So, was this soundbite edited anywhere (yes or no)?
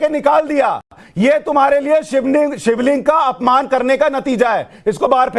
no